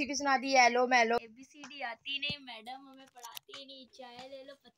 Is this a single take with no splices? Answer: no; 1 cut; at 1.2 s

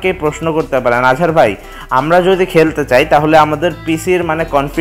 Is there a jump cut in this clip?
no; 0 cuts

